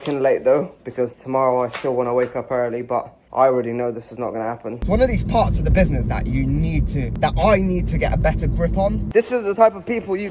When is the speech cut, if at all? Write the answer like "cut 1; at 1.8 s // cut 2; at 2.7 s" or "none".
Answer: cut 1; at 4.8 s // cut 2; at 9.0 s